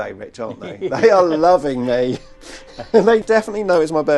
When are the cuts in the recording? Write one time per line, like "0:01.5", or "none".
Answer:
0:03.2